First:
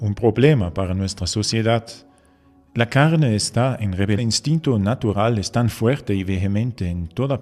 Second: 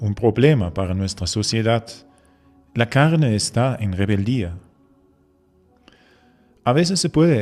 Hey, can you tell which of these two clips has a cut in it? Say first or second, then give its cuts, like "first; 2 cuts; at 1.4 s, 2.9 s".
second; 1 cut; at 4.2 s